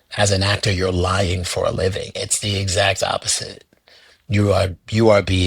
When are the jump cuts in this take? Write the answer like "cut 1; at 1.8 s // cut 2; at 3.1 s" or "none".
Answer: none

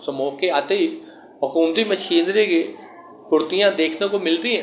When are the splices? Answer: none

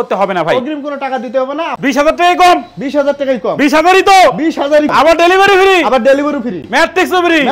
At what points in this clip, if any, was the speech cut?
cut 1; at 1.8 s // cut 2; at 4.9 s // cut 3; at 6.6 s

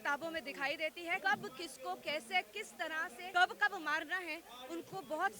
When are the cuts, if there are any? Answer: cut 1; at 1.2 s // cut 2; at 3.2 s

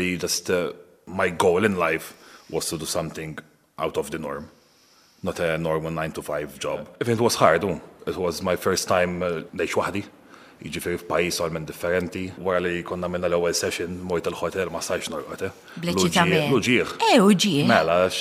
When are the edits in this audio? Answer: cut 1; at 1.0 s // cut 2; at 6.9 s // cut 3; at 9.5 s // cut 4; at 12.4 s

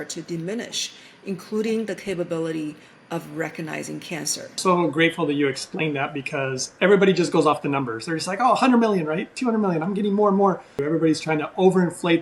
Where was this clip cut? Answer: cut 1; at 4.4 s // cut 2; at 10.8 s

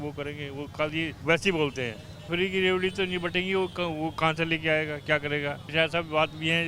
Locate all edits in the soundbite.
cut 1; at 1.2 s // cut 2; at 2.3 s // cut 3; at 5.6 s

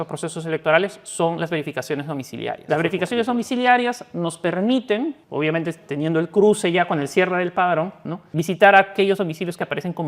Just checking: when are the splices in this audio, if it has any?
cut 1; at 2.6 s // cut 2; at 5.2 s // cut 3; at 8.2 s

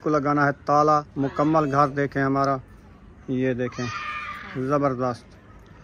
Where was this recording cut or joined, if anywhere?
cut 1; at 1.1 s

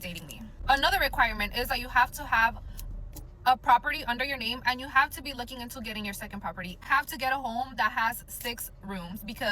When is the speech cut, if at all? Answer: cut 1; at 1.8 s

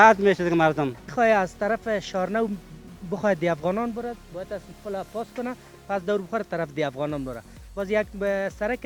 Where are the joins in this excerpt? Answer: cut 1; at 1.1 s

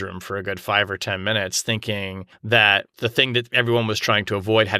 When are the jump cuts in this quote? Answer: cut 1; at 2.3 s // cut 2; at 2.9 s

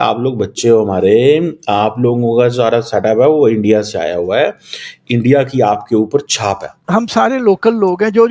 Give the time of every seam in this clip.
cut 1; at 6.7 s

